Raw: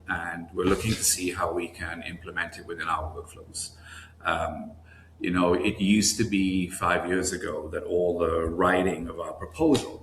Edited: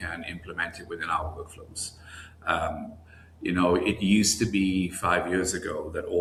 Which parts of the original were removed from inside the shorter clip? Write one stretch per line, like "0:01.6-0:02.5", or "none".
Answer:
none